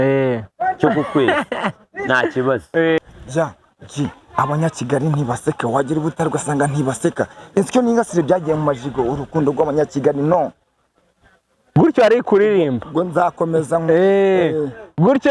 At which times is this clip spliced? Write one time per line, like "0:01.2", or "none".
0:03.0